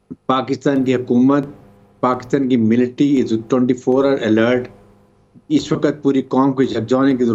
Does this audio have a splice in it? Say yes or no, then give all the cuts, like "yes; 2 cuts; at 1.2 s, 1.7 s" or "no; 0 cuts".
no; 0 cuts